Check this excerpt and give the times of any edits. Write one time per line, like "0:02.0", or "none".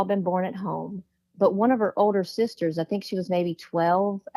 none